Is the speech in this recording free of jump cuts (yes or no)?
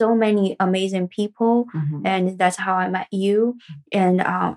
yes